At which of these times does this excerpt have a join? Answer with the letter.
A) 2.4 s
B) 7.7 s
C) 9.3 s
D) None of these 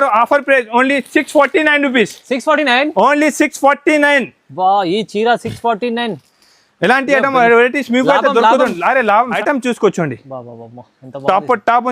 C